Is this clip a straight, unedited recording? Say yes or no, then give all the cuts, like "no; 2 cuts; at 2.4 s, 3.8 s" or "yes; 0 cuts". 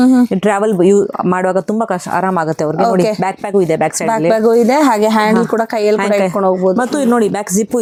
yes; 0 cuts